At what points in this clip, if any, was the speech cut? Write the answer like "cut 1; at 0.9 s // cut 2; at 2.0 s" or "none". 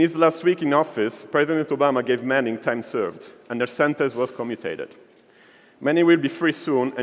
cut 1; at 4.1 s